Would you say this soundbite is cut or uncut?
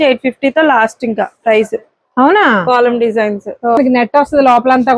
cut